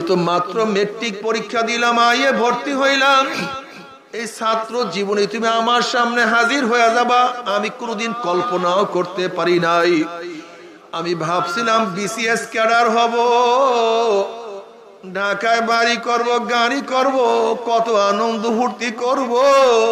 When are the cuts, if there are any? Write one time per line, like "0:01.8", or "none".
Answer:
none